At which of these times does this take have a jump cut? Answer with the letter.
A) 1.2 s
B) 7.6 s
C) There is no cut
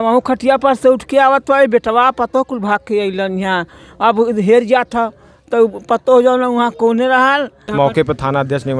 B